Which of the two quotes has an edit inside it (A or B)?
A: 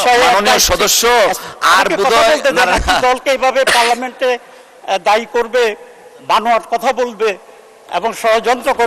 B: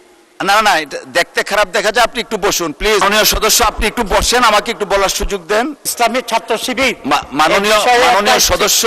B